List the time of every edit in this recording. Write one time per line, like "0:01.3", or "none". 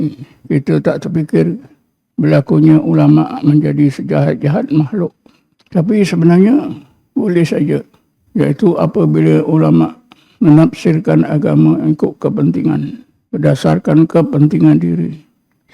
0:14.1